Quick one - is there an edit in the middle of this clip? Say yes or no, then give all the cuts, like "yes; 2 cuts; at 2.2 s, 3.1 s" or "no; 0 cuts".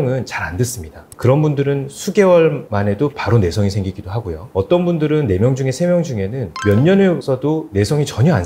no; 0 cuts